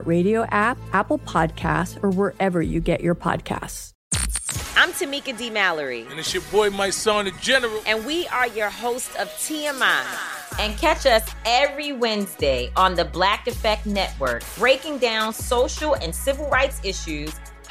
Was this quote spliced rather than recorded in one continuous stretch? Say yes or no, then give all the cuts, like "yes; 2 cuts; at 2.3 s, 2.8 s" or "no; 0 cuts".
yes; 1 cut; at 3.8 s